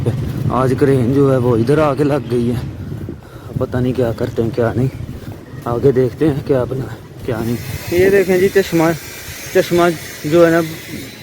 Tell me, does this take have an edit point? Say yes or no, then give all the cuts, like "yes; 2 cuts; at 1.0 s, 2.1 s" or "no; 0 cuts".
yes; 1 cut; at 7.7 s